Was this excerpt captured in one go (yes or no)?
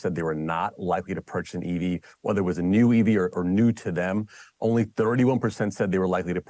yes